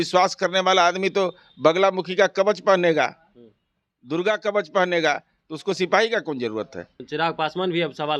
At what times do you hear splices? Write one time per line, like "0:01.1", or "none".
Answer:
0:07.0